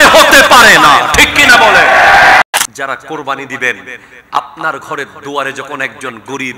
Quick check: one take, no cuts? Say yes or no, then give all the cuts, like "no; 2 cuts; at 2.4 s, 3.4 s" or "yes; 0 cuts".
no; 1 cut; at 2.4 s